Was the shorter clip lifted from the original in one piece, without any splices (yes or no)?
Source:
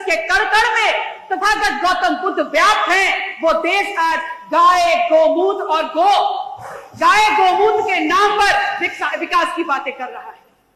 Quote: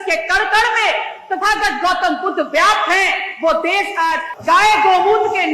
no